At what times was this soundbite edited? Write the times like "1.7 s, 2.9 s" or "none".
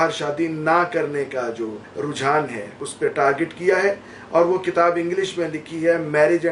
1.8 s, 2.9 s